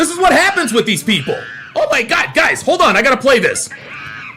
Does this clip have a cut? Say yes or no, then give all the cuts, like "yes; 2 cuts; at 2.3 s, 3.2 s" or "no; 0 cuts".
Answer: yes; 1 cut; at 1.5 s